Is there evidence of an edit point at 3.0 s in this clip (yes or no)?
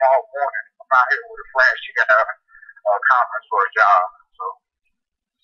yes